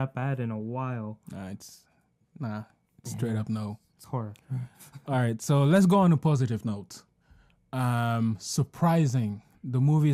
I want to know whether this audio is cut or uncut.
uncut